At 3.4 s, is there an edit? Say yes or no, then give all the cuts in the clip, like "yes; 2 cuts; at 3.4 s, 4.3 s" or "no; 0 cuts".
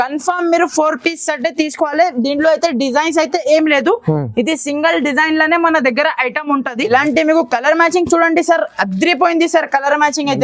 no; 1 cut; at 6.9 s